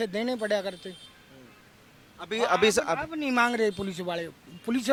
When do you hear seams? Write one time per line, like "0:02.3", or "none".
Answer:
none